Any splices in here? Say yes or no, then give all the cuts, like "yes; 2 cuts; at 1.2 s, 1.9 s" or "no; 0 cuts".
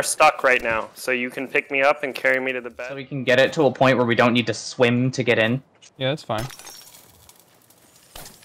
yes; 1 cut; at 2.6 s